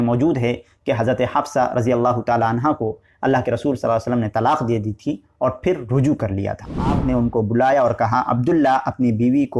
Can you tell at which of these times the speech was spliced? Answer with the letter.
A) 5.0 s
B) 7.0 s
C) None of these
B